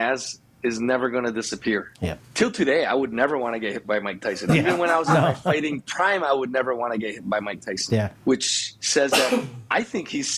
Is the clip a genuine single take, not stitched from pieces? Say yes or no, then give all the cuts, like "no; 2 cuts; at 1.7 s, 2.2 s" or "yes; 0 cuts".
no; 2 cuts; at 2.2 s, 8.1 s